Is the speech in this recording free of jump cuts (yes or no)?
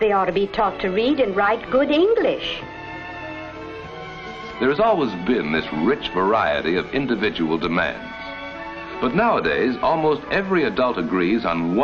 yes